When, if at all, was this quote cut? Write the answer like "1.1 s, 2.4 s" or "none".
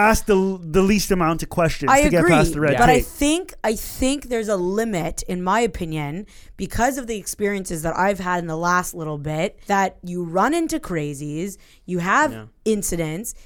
9.6 s